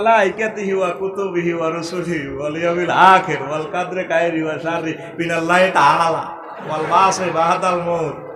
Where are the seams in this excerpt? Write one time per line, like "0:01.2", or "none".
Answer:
none